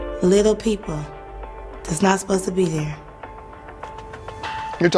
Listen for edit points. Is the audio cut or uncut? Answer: uncut